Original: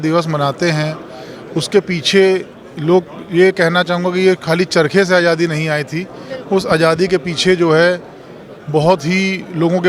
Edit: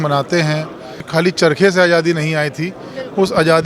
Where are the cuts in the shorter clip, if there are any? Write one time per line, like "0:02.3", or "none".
0:01.1